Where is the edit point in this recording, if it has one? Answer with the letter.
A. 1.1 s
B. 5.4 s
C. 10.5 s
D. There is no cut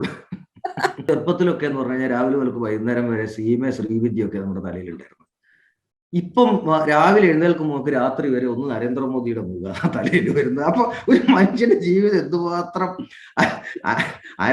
A